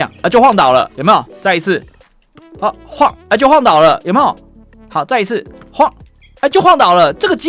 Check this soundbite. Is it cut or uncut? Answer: uncut